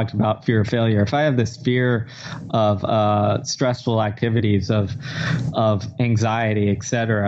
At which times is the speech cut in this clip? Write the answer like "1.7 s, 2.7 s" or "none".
none